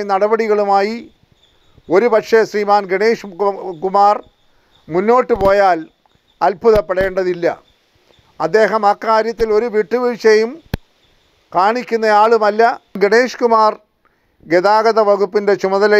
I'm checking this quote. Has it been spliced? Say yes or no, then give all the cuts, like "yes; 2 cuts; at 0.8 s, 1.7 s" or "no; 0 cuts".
yes; 1 cut; at 12.9 s